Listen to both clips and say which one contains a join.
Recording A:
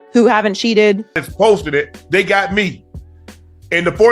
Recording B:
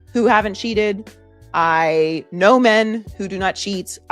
A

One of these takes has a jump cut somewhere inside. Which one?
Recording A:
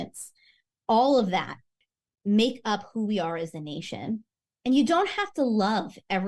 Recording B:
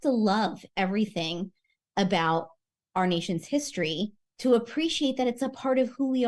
A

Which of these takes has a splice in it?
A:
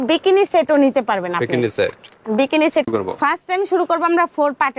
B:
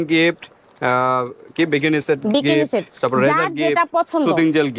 A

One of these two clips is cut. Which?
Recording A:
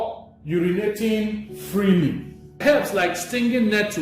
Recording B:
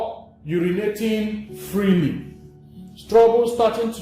A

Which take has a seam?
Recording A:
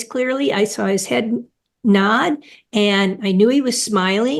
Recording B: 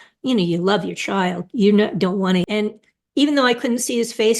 B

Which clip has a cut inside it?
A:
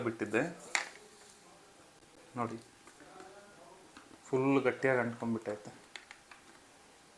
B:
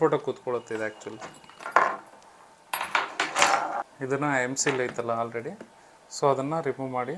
B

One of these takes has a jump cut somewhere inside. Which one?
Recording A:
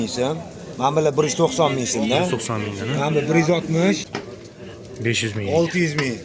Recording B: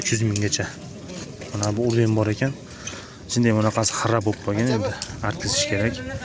A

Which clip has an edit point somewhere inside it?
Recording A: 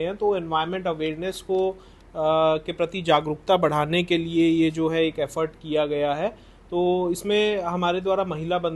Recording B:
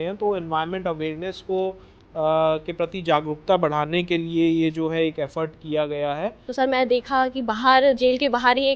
B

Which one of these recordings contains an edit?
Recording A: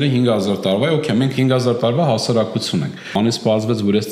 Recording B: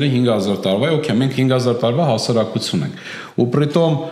A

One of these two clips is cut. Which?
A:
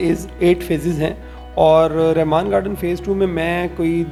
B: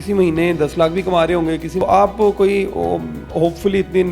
B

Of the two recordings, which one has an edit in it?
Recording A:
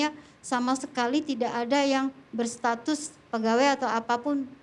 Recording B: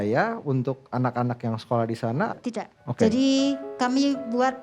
B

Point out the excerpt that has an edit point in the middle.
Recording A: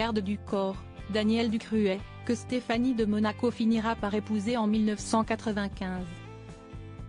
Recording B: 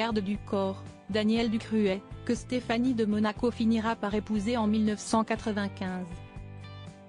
B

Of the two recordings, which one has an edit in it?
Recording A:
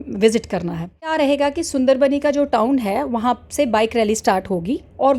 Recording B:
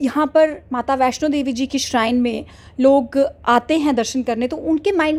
A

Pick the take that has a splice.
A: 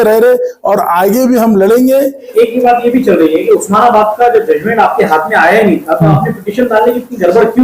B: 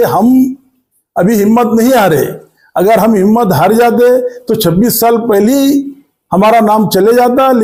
A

